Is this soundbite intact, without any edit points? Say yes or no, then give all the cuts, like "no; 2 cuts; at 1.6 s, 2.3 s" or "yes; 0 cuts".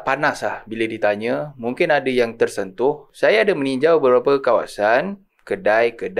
no; 1 cut; at 3.1 s